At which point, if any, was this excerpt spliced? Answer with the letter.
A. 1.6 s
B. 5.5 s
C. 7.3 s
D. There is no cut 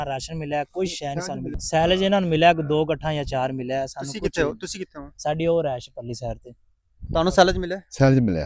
A